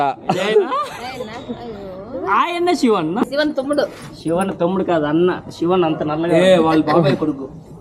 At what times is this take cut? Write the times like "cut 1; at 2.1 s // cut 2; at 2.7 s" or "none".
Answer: cut 1; at 3.3 s